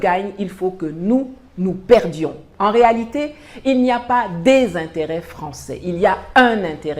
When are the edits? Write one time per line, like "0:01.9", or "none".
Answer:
0:02.4